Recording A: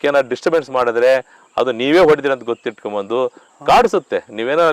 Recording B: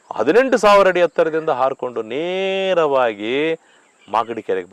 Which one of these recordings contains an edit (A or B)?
A